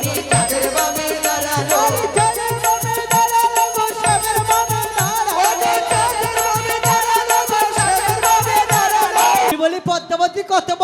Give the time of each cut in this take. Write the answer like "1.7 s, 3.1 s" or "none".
9.5 s